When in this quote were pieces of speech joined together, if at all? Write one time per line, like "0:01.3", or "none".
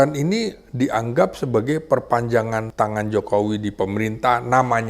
0:02.7